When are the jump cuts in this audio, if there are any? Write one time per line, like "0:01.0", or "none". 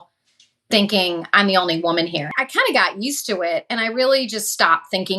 0:02.4

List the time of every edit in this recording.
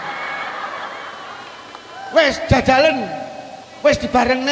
none

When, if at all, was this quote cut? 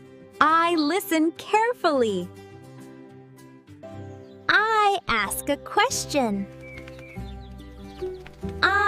0:03.8

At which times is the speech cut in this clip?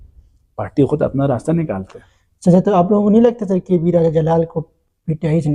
none

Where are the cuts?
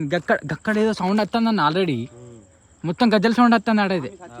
none

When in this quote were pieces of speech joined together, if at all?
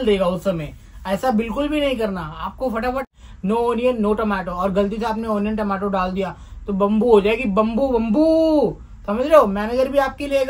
0:03.1

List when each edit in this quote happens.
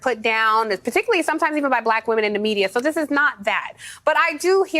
0:03.7

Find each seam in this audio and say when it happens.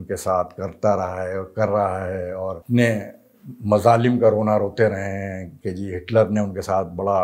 0:02.6

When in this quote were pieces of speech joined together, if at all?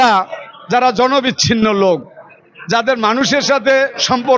none

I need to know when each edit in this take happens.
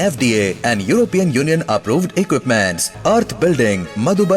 none

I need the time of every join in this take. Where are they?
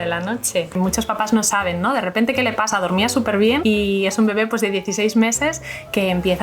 0:00.8
0:03.6

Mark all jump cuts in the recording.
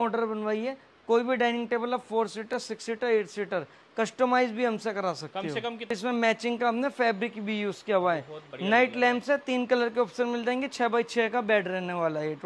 0:06.0

